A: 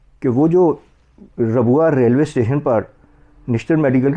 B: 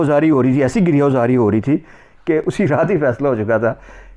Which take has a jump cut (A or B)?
B